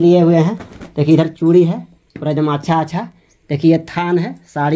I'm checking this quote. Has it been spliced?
no; 0 cuts

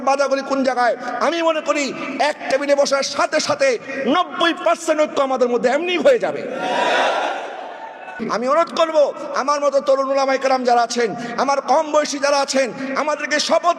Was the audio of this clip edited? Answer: yes; 1 cut; at 8.1 s

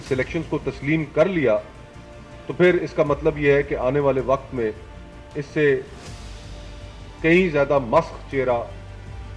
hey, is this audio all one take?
yes; 0 cuts

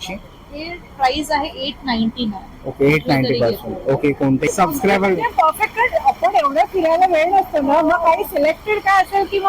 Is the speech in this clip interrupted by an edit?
yes; 1 cut; at 4.4 s

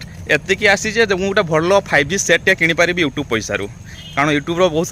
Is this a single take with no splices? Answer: yes; 0 cuts

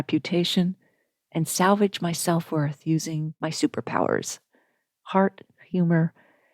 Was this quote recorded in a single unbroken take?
no; 1 cut; at 3.3 s

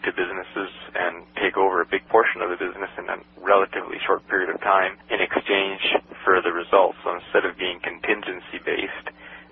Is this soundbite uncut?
yes; 0 cuts

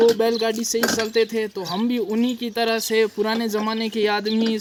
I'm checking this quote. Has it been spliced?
no; 0 cuts

